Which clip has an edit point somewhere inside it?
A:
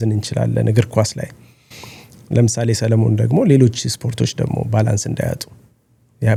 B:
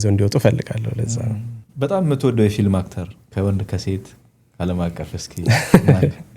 B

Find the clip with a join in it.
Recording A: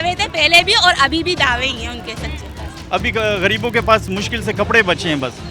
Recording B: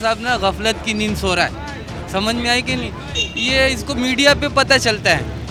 A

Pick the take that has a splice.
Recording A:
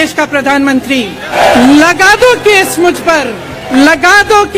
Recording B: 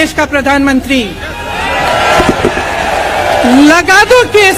A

